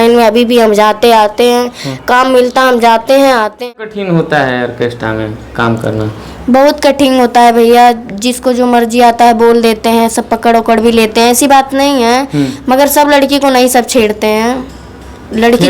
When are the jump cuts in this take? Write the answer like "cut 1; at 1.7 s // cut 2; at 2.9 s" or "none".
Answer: cut 1; at 3.6 s